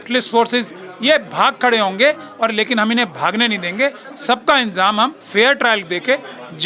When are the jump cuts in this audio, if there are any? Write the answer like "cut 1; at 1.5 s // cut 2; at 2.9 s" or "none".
none